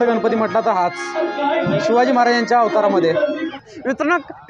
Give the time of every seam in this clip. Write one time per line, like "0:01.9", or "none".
0:03.5